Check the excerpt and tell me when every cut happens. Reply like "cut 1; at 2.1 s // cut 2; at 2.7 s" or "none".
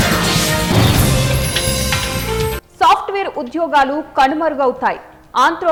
none